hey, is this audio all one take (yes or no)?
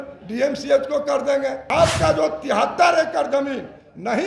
no